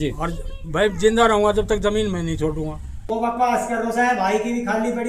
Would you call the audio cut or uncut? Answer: cut